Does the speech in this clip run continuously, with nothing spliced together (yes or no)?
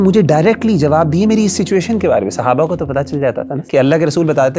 no